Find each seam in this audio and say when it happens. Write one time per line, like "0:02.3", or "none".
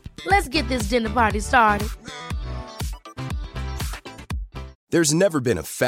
0:04.7